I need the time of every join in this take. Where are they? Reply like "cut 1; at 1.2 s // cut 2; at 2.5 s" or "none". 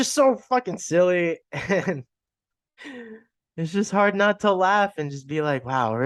none